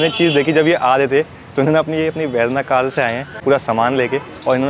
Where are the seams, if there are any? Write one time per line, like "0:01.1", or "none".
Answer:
0:03.3